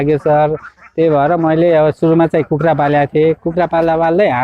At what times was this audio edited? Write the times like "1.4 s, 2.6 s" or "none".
none